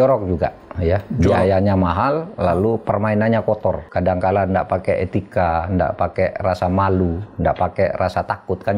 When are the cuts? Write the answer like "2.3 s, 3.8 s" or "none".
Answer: 3.8 s